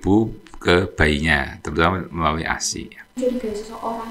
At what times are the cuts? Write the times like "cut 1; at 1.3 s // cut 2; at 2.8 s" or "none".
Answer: cut 1; at 3.2 s